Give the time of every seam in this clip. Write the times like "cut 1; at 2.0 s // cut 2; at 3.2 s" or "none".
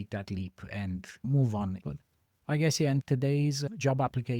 cut 1; at 1.8 s